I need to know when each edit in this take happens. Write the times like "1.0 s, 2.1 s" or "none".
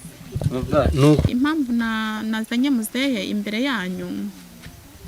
1.2 s